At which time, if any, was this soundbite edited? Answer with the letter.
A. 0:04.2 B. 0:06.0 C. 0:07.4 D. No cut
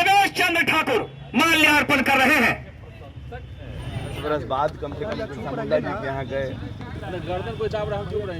A